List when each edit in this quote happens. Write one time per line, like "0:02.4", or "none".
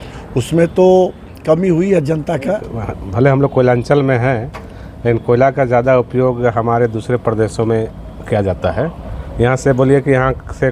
0:02.7